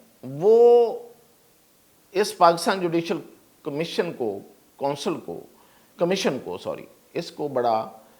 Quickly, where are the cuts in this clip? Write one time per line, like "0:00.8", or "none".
none